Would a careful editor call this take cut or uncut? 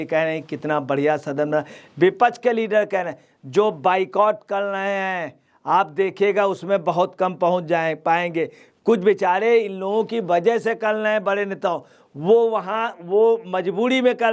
uncut